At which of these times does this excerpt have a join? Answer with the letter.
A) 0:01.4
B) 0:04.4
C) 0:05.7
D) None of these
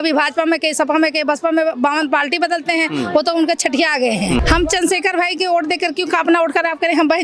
B